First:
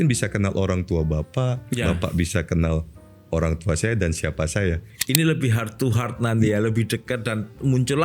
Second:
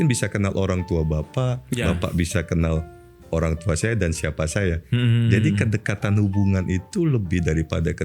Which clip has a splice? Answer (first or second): first